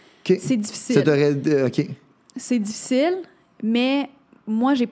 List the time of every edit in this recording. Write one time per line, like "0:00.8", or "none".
none